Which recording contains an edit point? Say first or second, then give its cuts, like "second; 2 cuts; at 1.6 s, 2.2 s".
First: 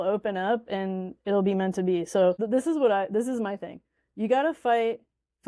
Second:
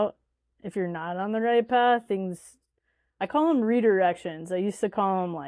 first; 1 cut; at 2.4 s